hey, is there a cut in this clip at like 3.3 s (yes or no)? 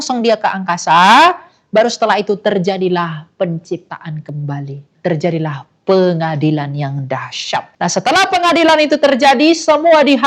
no